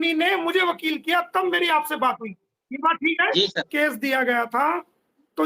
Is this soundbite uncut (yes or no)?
no